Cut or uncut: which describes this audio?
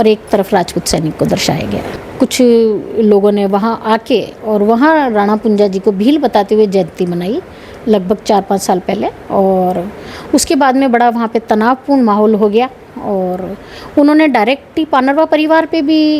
uncut